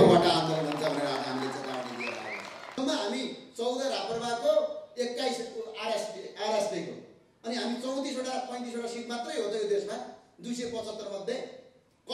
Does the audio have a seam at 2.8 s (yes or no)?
yes